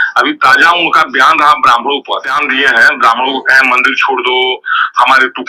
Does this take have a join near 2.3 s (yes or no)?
yes